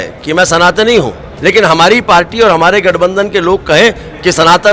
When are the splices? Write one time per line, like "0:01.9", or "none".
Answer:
0:01.2